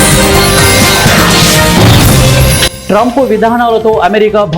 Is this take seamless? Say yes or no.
no